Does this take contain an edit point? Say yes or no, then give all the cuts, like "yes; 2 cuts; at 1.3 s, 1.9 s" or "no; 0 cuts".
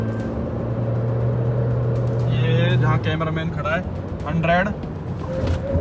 no; 0 cuts